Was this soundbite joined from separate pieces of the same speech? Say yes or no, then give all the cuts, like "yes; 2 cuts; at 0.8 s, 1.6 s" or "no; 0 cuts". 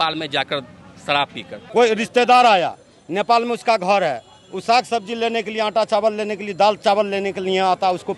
yes; 1 cut; at 1.6 s